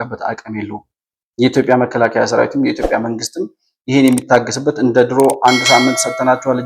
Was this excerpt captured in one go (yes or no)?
yes